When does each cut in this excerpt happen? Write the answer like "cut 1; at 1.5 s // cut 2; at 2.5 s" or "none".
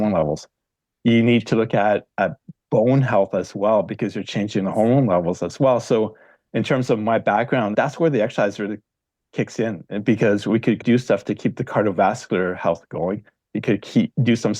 cut 1; at 7.7 s // cut 2; at 10.8 s